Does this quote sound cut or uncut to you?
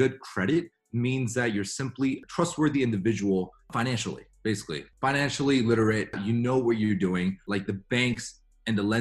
cut